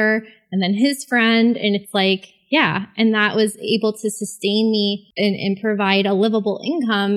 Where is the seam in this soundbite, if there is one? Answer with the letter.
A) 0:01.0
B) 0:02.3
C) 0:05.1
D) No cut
C